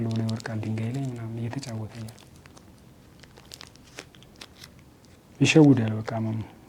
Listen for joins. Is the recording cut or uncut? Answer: uncut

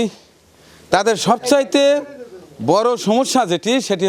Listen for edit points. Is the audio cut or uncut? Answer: uncut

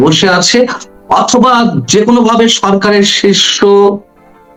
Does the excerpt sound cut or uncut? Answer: uncut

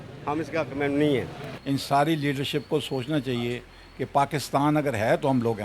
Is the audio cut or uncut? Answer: cut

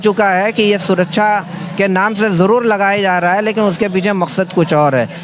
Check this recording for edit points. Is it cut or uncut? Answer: uncut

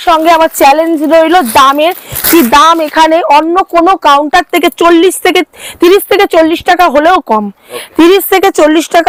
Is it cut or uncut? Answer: uncut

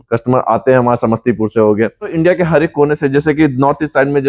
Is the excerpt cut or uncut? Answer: cut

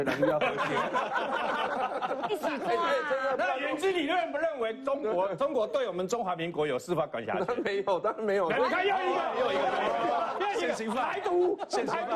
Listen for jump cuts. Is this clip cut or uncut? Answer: uncut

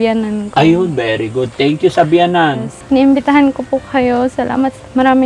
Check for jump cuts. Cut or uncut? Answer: cut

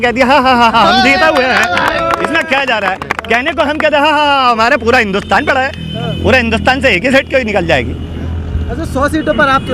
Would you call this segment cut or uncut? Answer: uncut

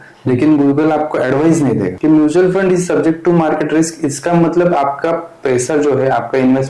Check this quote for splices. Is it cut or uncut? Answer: cut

